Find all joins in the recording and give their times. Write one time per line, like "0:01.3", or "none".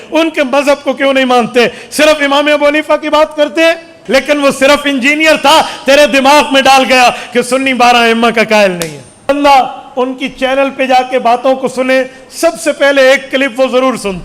0:04.0
0:09.3